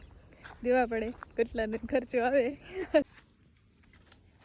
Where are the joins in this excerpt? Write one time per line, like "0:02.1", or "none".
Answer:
0:03.1